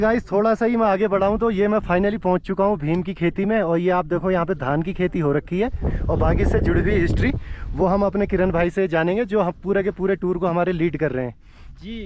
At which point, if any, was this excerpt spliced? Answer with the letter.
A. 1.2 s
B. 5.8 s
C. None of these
C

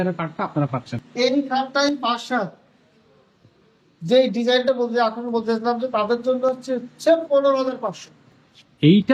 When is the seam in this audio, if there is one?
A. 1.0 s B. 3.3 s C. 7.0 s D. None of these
A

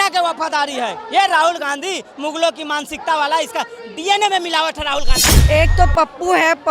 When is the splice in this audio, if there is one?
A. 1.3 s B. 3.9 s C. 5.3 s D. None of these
C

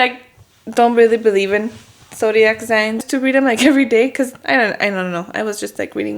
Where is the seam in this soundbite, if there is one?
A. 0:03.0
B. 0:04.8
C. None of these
A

